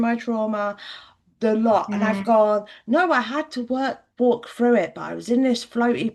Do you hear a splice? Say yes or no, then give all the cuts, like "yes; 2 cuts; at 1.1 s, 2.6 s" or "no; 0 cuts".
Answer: no; 0 cuts